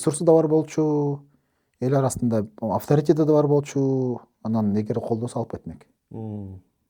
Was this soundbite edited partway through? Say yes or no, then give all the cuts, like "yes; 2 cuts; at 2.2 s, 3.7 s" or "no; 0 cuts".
no; 0 cuts